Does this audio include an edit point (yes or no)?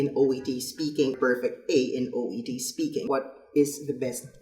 yes